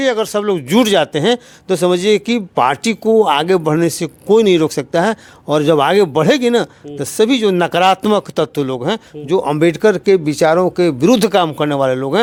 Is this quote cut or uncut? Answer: uncut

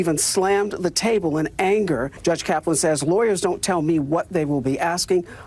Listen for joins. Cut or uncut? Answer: cut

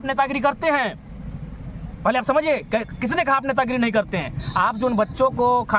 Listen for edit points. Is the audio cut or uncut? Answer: uncut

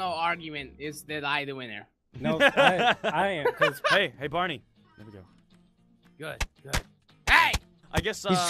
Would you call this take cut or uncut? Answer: uncut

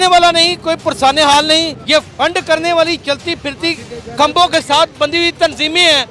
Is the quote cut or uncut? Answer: cut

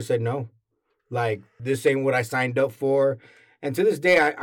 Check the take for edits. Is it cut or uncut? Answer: cut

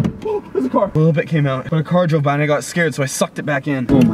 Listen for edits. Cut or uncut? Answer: uncut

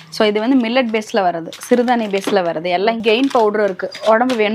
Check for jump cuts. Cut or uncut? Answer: cut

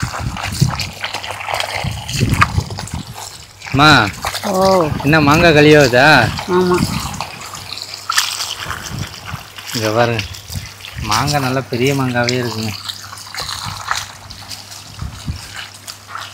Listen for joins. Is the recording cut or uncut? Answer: uncut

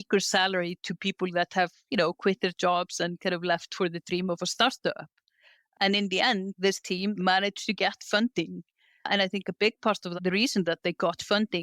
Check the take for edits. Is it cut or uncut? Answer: cut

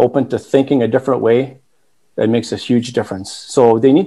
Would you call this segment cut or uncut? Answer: uncut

